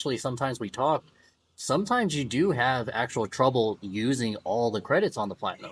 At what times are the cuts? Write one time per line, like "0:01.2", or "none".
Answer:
none